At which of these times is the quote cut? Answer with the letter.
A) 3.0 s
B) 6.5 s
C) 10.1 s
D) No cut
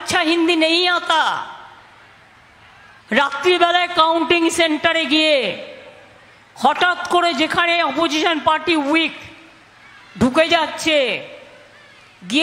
A